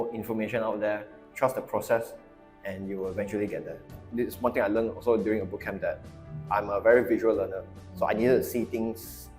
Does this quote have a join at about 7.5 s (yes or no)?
no